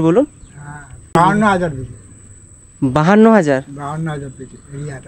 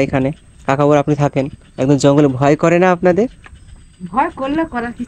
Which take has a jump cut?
first; 1 cut; at 1.1 s

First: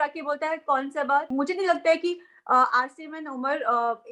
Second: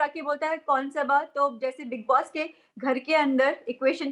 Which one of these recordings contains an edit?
first; 1 cut; at 1.3 s

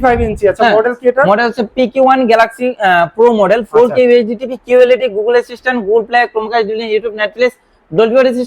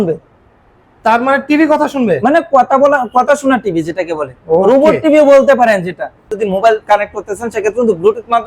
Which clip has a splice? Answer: second; 1 cut; at 6.3 s

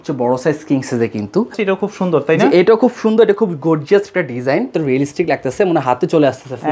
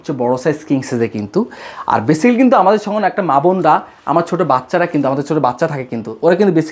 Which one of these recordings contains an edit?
first; 2 cuts; at 1.6 s, 4.7 s

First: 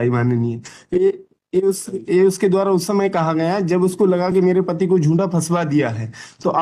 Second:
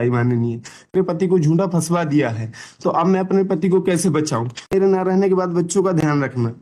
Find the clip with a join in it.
second; 2 cuts; at 0.9 s, 4.7 s

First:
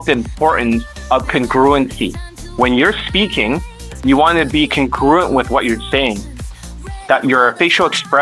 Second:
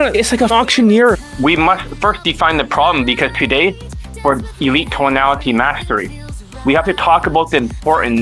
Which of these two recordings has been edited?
second; 1 cut; at 1.2 s

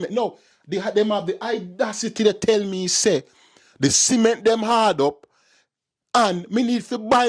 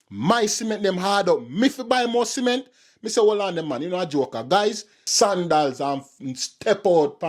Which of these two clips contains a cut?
second; 1 cut; at 5.0 s

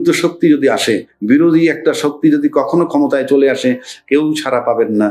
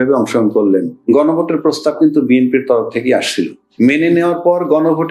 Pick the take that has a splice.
second; 2 cuts; at 1.0 s, 3.6 s

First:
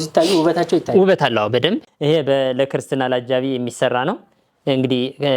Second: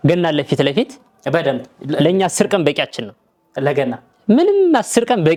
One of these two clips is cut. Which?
first; 1 cut; at 1.9 s

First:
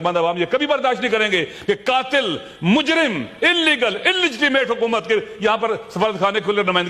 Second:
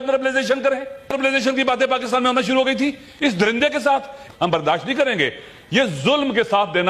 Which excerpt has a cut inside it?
second; 2 cuts; at 1.1 s, 4.2 s

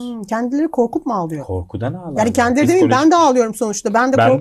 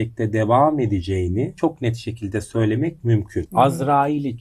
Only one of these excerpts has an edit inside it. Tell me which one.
second; 2 cuts; at 1.5 s, 3.4 s

